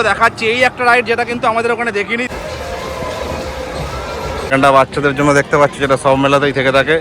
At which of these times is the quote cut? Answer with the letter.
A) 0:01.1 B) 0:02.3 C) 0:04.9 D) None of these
D